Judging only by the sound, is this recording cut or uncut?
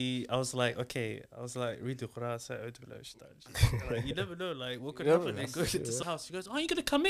cut